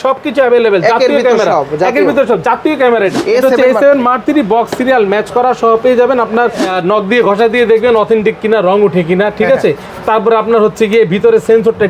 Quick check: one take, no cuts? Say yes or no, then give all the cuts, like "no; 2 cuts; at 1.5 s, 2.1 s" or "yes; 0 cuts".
no; 2 cuts; at 3.2 s, 6.7 s